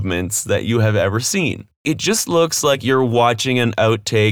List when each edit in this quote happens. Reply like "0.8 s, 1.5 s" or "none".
1.8 s